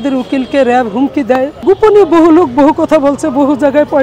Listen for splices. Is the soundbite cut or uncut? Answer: cut